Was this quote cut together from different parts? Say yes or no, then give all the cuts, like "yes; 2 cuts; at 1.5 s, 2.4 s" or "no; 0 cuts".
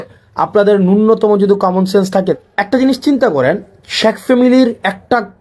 yes; 1 cut; at 2.3 s